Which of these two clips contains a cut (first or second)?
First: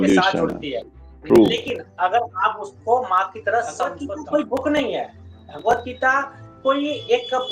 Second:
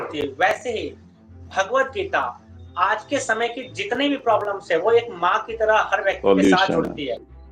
first